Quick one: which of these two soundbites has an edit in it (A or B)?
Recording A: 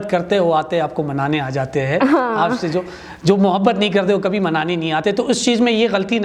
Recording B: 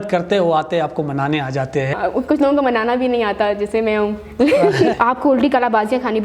B